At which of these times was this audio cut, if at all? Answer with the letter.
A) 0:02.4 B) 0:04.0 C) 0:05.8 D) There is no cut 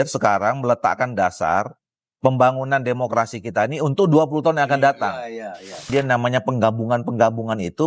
C